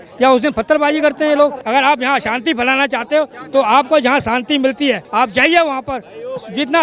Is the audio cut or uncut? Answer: cut